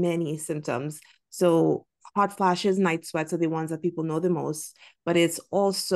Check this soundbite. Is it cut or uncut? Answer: uncut